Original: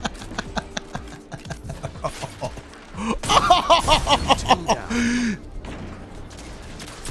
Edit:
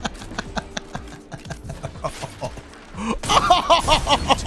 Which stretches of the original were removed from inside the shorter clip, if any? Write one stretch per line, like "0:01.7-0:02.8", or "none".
none